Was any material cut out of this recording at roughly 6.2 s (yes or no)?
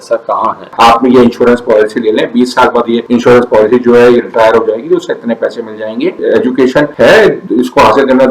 yes